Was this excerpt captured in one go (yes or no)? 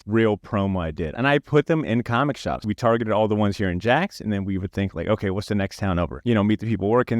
no